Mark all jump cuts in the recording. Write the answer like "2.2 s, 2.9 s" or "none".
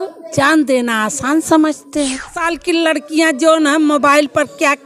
2.4 s